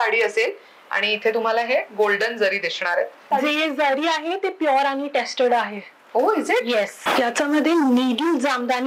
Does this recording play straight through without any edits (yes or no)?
no